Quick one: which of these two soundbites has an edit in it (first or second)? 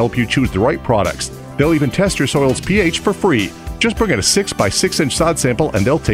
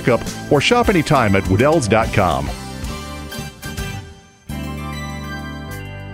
second